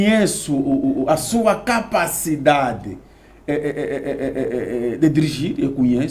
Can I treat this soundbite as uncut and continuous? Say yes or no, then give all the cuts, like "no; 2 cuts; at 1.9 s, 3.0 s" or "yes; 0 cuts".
yes; 0 cuts